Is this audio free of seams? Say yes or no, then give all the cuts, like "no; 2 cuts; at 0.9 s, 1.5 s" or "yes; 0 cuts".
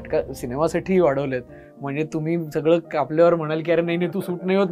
yes; 0 cuts